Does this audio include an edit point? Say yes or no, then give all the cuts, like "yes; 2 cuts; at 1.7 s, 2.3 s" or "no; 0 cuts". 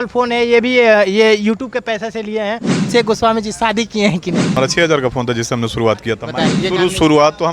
yes; 3 cuts; at 2.9 s, 4.5 s, 6.6 s